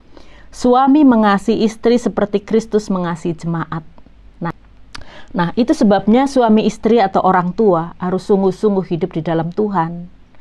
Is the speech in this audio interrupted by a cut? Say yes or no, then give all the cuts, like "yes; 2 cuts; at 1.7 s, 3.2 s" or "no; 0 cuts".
yes; 1 cut; at 4.5 s